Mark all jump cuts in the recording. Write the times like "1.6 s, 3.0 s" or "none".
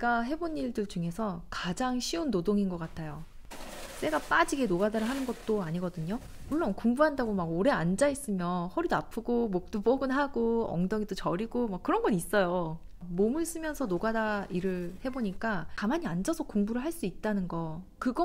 none